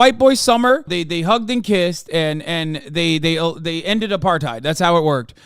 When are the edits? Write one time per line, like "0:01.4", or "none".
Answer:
0:00.9